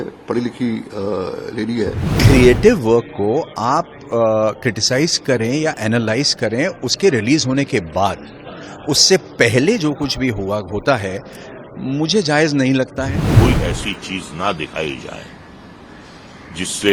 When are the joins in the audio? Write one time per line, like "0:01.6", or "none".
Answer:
0:02.1
0:13.3